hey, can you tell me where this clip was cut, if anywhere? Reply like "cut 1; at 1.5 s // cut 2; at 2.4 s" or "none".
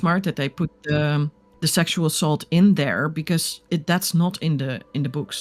cut 1; at 1.4 s // cut 2; at 3.5 s